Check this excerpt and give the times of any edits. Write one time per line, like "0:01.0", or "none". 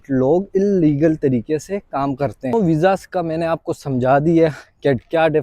0:02.5